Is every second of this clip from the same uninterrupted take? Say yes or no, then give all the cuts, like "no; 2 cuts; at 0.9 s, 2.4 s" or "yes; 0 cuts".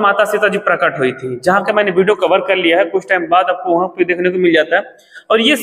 yes; 0 cuts